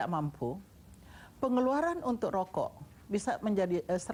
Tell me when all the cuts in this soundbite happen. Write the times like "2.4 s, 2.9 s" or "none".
none